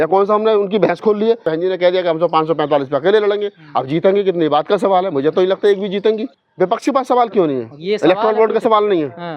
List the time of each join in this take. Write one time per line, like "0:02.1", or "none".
0:01.4
0:06.4